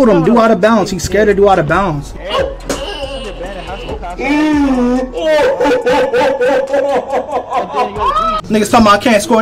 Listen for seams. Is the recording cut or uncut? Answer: cut